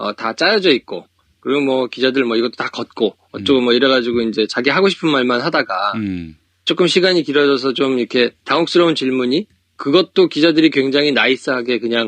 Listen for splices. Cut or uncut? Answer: cut